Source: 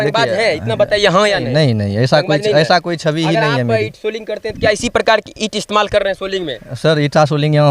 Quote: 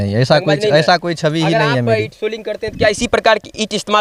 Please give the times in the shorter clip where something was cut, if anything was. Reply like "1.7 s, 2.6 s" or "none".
none